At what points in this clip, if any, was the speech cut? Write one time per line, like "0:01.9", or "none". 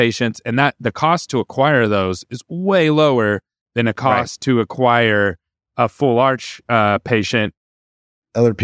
0:07.6